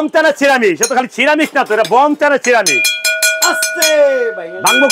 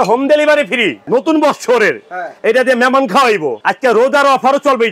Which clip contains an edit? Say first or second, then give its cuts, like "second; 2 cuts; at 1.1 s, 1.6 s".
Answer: second; 2 cuts; at 1.0 s, 3.6 s